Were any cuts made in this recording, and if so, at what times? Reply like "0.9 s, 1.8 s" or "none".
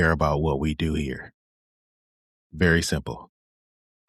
none